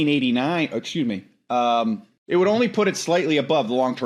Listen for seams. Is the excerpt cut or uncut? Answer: cut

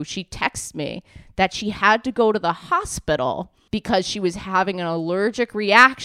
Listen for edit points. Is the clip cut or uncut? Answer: cut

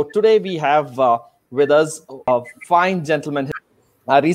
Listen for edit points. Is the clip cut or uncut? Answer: cut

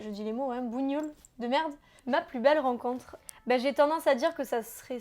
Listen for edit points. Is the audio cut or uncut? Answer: cut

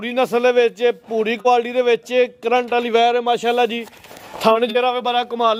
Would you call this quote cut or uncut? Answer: uncut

